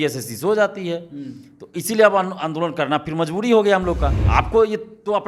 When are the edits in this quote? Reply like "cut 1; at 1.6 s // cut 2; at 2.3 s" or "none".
cut 1; at 4.1 s